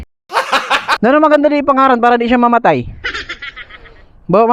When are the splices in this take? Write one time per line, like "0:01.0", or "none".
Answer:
0:01.0